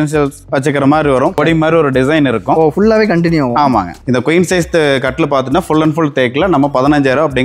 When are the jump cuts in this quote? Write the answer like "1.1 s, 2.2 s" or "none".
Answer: 1.4 s, 4.0 s